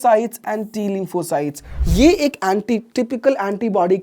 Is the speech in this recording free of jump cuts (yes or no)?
no